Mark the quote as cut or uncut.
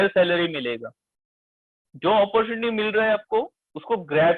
cut